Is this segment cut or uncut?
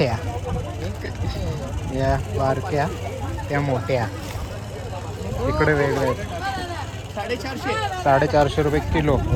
uncut